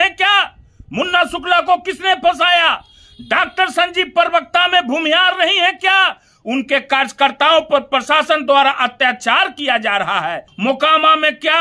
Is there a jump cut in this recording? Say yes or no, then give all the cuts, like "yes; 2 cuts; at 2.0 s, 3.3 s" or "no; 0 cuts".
yes; 1 cut; at 10.5 s